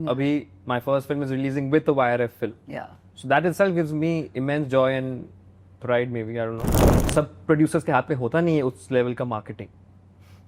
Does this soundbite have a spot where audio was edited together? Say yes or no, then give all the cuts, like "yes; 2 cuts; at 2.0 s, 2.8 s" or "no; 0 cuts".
yes; 1 cut; at 6.7 s